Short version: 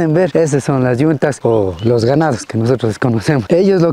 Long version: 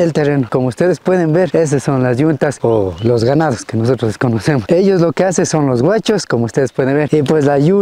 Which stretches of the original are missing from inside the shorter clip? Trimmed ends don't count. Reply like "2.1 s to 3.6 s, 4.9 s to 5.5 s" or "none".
none